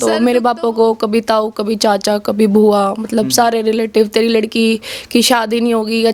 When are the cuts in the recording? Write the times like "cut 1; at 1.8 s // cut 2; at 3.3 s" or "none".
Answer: none